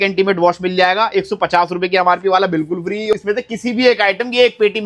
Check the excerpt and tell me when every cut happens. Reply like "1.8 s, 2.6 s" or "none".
3.1 s